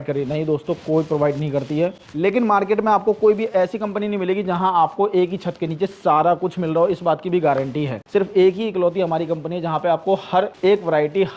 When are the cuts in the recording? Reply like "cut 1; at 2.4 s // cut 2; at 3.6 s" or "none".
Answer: cut 1; at 2.0 s // cut 2; at 7.9 s // cut 3; at 10.5 s